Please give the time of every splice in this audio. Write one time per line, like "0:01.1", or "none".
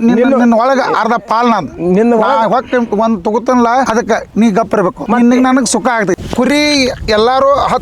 0:06.2